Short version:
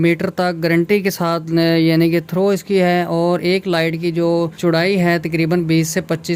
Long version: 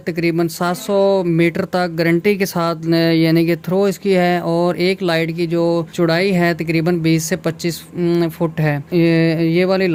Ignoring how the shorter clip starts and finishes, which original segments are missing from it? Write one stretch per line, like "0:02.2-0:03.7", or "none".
none

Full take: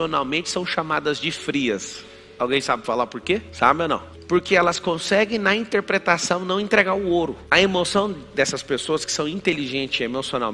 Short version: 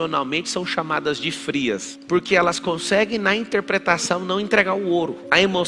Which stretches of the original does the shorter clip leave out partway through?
0:01.9-0:04.1

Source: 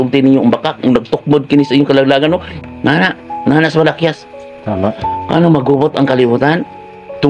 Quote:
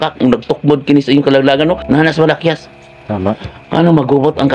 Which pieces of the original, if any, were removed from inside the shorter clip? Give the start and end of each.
0:02.4-0:03.4

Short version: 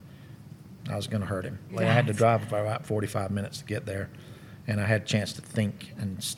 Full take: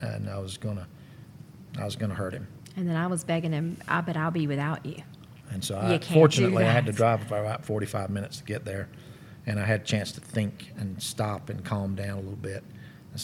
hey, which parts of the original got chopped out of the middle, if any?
0:02.7-0:06.6

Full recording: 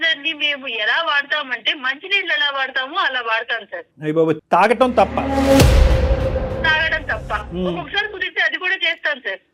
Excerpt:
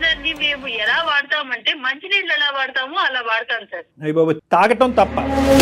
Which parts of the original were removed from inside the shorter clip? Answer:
none

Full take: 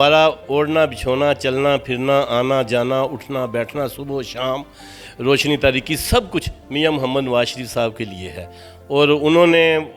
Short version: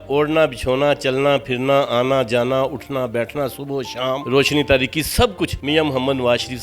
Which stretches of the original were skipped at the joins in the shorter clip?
0:04.6-0:05.2
0:06.5-0:06.6

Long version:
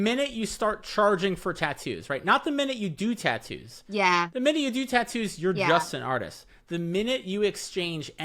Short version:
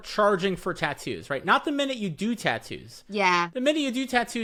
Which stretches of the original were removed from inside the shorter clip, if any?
none

